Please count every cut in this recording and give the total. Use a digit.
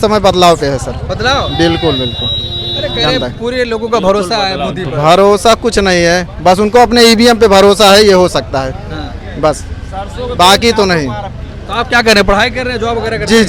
0